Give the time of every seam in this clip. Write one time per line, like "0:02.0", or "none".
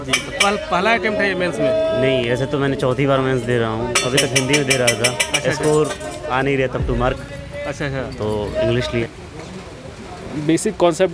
0:09.0